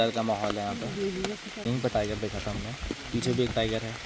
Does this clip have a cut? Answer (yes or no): yes